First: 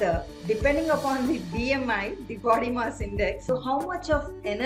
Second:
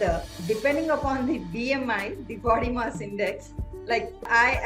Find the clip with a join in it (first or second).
first